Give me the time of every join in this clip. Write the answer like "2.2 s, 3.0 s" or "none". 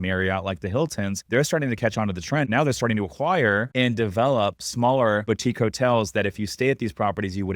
1.2 s, 2.5 s, 3.7 s, 5.2 s